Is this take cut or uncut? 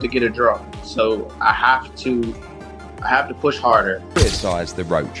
cut